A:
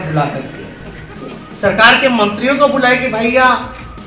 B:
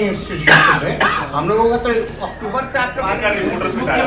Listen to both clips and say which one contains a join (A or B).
B